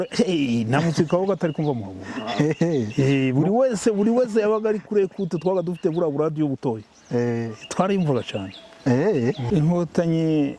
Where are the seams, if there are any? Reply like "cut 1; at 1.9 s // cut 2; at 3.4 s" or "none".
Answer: cut 1; at 9.4 s